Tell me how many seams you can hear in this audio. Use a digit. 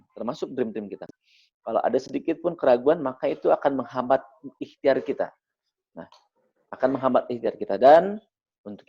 1